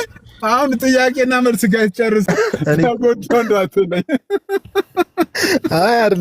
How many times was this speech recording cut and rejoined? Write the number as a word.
one